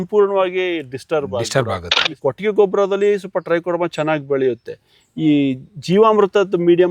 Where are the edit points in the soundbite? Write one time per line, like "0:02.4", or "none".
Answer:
0:02.0